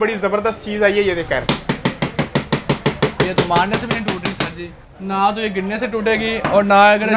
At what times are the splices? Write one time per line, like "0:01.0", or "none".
0:04.9